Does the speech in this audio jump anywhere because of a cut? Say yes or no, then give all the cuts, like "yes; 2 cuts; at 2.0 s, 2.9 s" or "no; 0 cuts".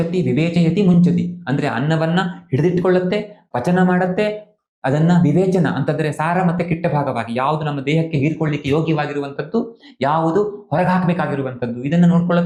no; 0 cuts